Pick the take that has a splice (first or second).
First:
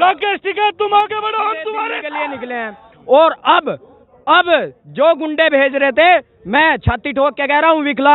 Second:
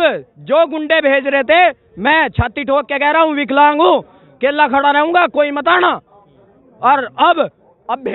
first